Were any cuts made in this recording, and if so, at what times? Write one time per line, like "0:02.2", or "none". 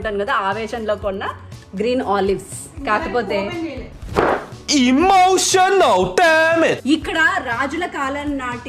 0:06.8